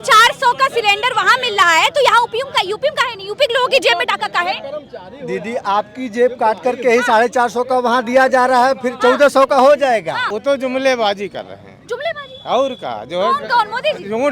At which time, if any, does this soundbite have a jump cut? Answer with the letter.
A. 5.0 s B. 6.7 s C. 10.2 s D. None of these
C